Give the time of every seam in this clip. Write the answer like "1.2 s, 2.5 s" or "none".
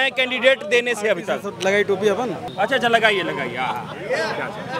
2.4 s